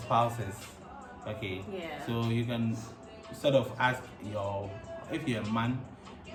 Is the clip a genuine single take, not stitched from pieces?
yes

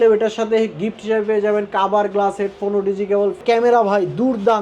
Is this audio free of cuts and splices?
no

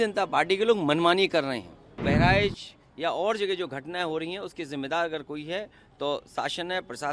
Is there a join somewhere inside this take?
yes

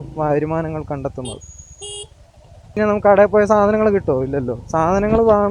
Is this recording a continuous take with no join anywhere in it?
no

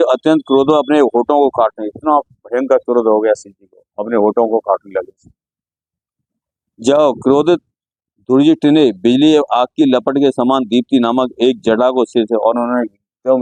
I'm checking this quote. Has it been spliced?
no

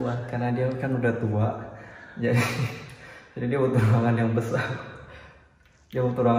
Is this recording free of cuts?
yes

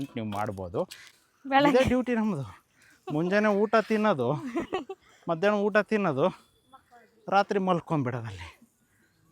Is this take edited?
yes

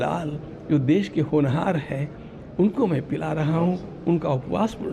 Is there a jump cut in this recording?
no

